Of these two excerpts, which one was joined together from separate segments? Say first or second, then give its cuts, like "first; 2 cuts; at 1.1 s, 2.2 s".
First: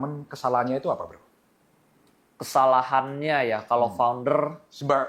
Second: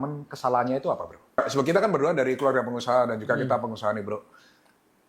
second; 1 cut; at 1.4 s